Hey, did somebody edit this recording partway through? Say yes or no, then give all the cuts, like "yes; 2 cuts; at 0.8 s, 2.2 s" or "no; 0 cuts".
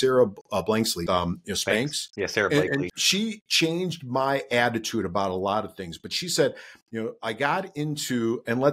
yes; 2 cuts; at 1.0 s, 3.0 s